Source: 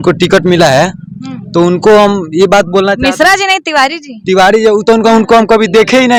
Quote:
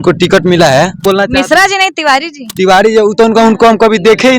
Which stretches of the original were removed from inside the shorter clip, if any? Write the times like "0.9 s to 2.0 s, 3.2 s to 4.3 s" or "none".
1.0 s to 2.7 s